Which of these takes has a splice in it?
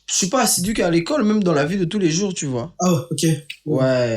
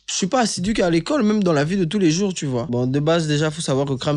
second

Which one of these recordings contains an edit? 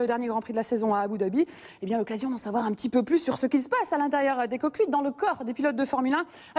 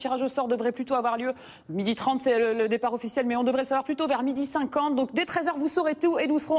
first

